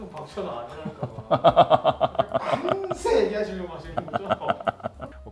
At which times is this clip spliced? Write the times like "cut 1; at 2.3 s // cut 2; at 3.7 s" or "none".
none